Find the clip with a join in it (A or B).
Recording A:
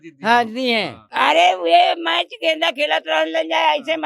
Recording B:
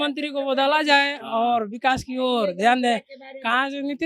A